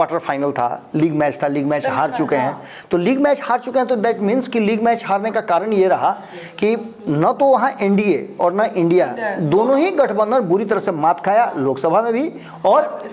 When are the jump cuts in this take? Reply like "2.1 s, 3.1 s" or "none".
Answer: none